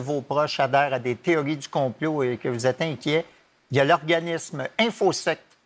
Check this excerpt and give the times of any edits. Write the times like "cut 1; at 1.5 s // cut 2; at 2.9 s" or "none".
none